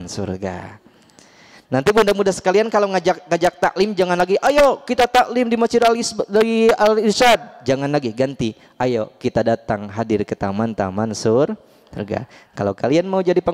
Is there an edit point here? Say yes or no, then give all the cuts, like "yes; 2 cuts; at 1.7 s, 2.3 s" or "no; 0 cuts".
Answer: no; 0 cuts